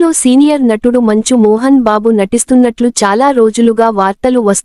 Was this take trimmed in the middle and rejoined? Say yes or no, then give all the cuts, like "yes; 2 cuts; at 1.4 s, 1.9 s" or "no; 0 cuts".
no; 0 cuts